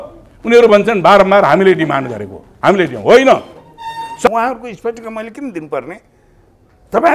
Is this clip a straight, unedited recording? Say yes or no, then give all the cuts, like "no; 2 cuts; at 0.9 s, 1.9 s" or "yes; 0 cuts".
no; 1 cut; at 4.3 s